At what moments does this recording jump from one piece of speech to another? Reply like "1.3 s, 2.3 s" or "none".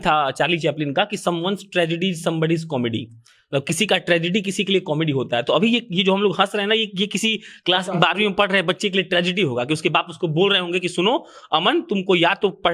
none